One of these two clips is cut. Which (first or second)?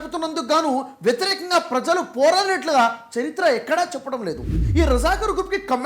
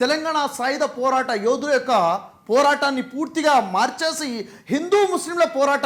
first